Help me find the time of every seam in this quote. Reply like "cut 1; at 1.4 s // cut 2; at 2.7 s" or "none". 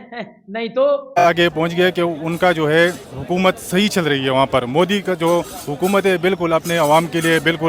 cut 1; at 1.2 s